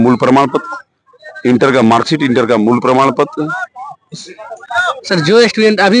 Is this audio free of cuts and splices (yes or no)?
yes